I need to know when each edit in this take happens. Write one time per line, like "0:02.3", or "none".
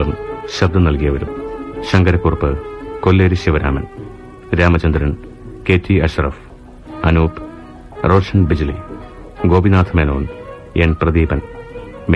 0:01.3